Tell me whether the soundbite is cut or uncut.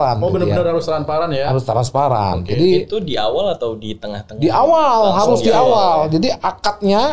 uncut